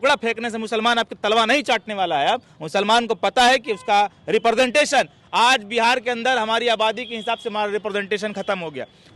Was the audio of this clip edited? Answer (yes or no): no